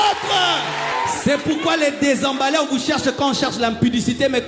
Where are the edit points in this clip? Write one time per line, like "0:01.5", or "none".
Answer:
0:00.9